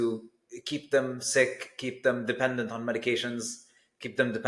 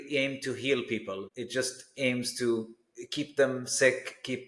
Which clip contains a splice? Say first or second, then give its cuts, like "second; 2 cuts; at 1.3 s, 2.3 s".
second; 1 cut; at 1.3 s